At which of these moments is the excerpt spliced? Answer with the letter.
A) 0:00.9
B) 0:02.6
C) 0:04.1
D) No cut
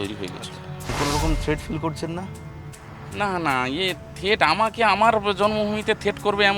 A